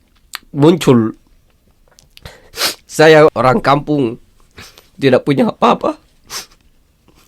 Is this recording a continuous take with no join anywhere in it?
no; 1 cut; at 3.3 s

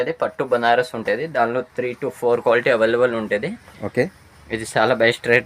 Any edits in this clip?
no; 0 cuts

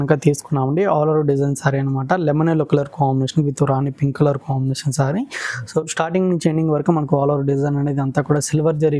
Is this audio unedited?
yes; 0 cuts

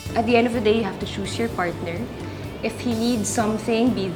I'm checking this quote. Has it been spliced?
no; 0 cuts

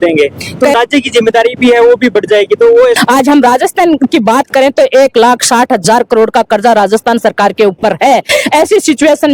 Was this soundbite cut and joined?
yes; 2 cuts; at 0.7 s, 3.0 s

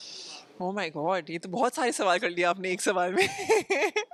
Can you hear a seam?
no; 0 cuts

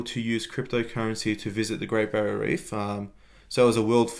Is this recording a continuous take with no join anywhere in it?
yes; 0 cuts

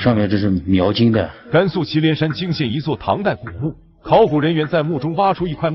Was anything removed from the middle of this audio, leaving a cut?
yes; 1 cut; at 1.4 s

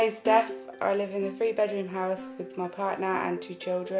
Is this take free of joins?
yes; 0 cuts

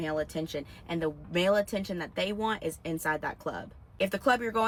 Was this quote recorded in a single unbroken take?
yes; 0 cuts

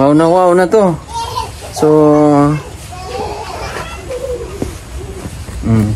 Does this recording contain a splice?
no; 0 cuts

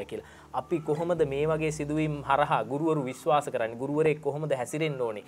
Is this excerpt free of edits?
yes; 0 cuts

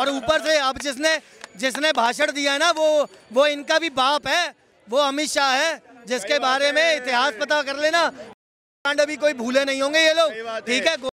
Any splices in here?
no; 0 cuts

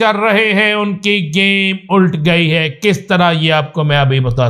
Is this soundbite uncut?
yes; 0 cuts

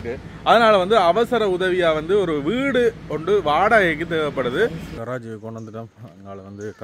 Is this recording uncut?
no; 1 cut; at 4.9 s

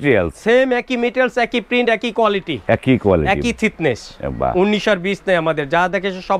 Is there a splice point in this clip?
no; 0 cuts

